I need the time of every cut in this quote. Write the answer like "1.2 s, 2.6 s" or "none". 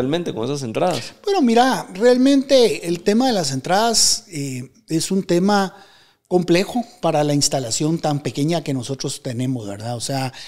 none